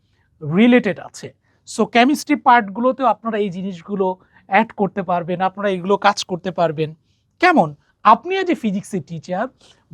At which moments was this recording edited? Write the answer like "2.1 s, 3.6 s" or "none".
7.8 s